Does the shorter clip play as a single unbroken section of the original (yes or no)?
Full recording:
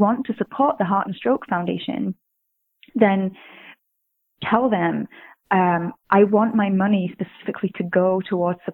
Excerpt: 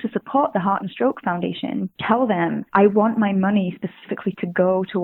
no